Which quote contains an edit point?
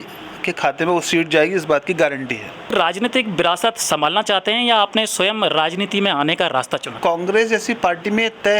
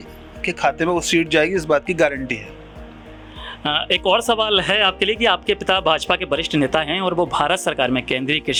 first; 2 cuts; at 2.7 s, 6.9 s

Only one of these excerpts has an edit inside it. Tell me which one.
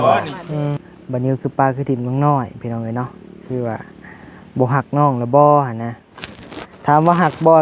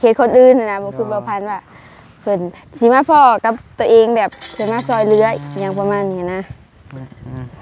first; 1 cut; at 0.9 s

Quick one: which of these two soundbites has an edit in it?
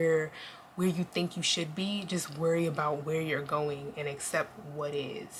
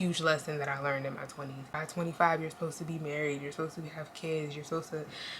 second; 1 cut; at 1.6 s

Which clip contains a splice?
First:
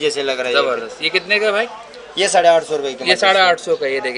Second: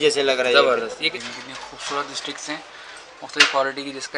second; 1 cut; at 1.0 s

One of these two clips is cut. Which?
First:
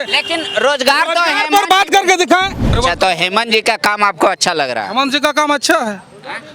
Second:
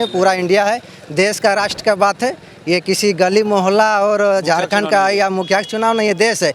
first; 1 cut; at 2.8 s

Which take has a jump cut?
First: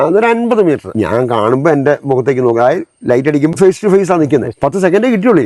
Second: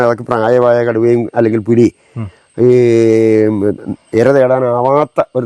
first; 3 cuts; at 0.9 s, 3.5 s, 4.6 s

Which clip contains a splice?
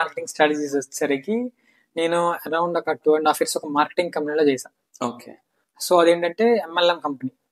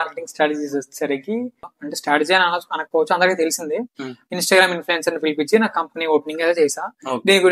second; 1 cut; at 1.8 s

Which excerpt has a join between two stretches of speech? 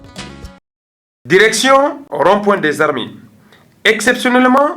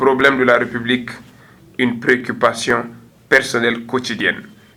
first; 1 cut; at 0.9 s

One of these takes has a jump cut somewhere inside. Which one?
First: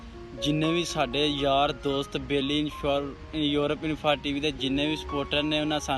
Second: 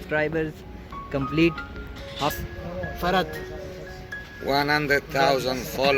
second; 1 cut; at 2.3 s

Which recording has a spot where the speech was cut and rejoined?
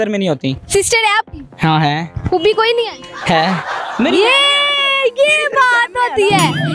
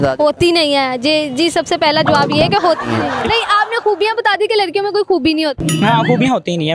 second; 1 cut; at 3.3 s

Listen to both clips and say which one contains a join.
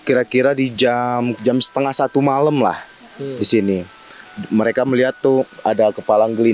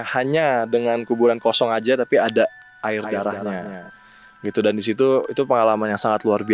first; 1 cut; at 1.3 s

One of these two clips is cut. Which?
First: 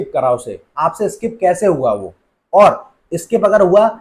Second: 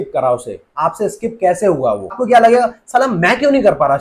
second; 1 cut; at 2.2 s

